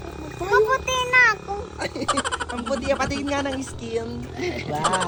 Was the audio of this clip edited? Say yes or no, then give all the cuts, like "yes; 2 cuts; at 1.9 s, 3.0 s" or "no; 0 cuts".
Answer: no; 0 cuts